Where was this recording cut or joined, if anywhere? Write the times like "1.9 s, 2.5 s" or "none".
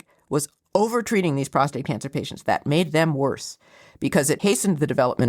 4.4 s